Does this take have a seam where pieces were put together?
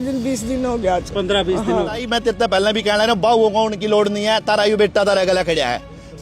yes; 1 cut; at 2.0 s

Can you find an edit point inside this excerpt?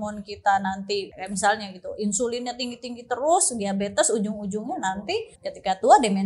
yes; 2 cuts; at 1.1 s, 5.4 s

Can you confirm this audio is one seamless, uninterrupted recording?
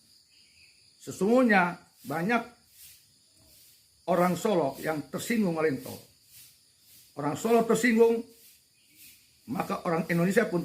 yes; 0 cuts

